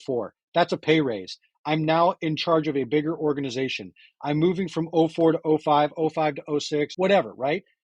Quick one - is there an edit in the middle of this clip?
yes; 2 cuts; at 2.2 s, 6.9 s

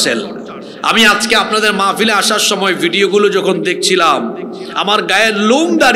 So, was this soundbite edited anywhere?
no; 0 cuts

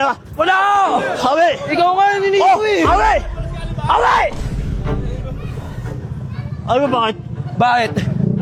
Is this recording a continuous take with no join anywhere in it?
yes; 0 cuts

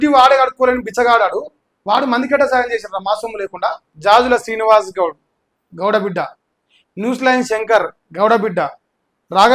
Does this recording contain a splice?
yes; 1 cut; at 3.9 s

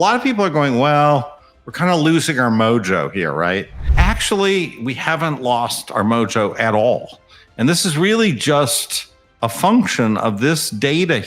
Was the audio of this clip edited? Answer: yes; 1 cut; at 3.8 s

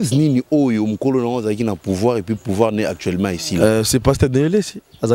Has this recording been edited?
no; 0 cuts

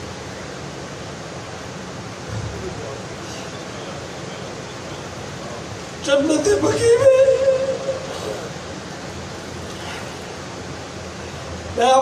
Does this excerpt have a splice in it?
no; 0 cuts

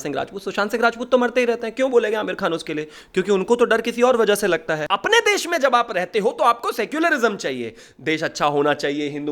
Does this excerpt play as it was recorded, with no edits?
no; 1 cut; at 4.9 s

